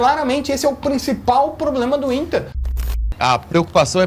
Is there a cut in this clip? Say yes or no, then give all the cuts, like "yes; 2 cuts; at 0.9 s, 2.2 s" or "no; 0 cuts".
yes; 1 cut; at 3.0 s